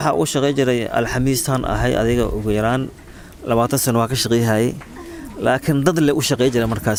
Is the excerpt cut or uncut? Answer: uncut